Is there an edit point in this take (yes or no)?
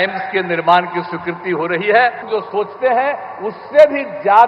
yes